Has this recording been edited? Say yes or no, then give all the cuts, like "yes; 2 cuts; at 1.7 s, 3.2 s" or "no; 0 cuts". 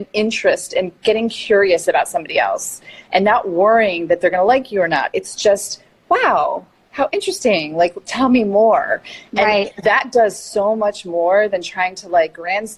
no; 0 cuts